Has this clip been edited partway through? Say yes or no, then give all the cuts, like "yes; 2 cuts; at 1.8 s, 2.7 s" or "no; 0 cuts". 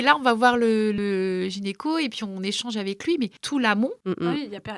yes; 2 cuts; at 1.0 s, 3.7 s